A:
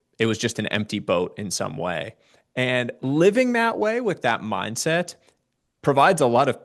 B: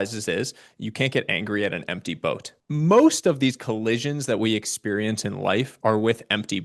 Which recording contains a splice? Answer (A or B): B